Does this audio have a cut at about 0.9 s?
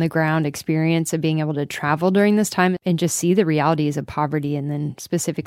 no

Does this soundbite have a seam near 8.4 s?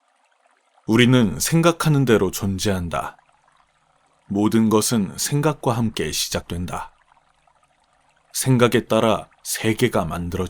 yes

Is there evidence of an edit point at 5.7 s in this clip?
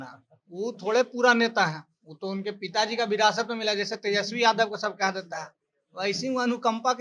no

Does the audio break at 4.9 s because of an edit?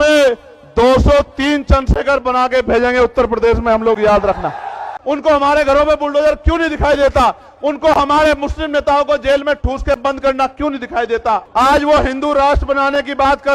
yes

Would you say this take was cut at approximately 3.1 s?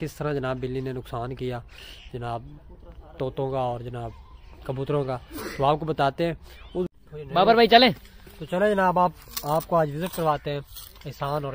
no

